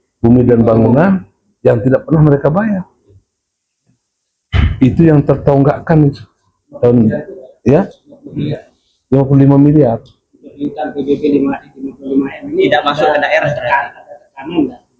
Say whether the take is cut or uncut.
uncut